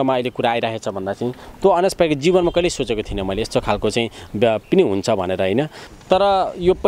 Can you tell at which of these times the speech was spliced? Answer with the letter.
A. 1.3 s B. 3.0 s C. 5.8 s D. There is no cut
C